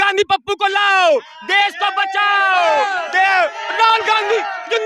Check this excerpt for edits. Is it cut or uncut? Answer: uncut